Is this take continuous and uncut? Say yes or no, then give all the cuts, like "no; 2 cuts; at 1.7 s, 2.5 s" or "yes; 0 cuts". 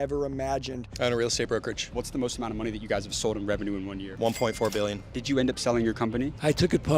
no; 4 cuts; at 0.8 s, 1.8 s, 4.1 s, 5.1 s